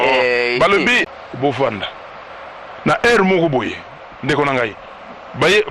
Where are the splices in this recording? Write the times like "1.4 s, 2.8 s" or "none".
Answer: 1.1 s